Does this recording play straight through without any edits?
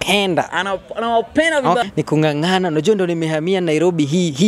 no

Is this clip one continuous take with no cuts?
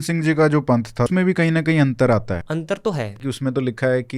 no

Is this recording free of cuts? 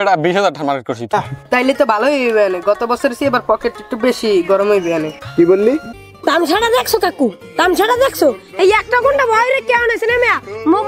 no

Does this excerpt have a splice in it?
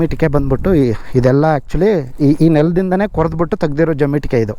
no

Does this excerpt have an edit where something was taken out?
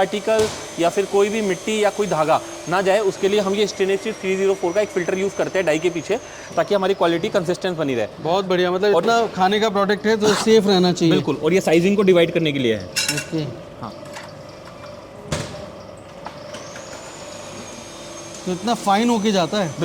no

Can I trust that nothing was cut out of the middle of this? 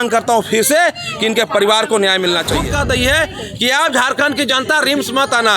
no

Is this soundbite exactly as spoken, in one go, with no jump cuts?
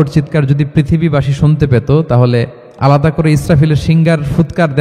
no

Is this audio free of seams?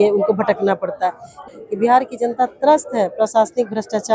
no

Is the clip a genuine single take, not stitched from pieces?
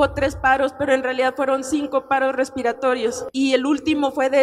no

